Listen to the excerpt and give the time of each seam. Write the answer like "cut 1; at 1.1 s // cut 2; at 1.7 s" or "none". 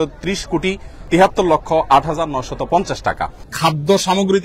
cut 1; at 3.4 s